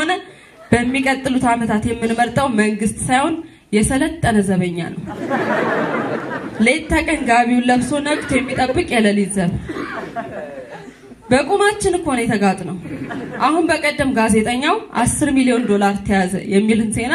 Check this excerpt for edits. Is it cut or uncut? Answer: uncut